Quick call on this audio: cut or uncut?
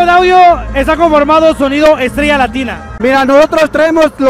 uncut